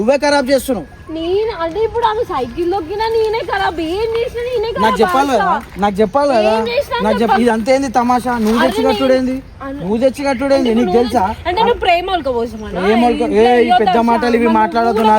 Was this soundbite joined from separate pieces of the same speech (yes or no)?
no